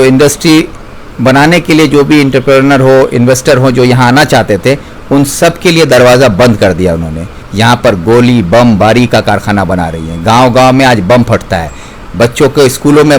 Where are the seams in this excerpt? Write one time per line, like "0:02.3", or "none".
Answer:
0:07.4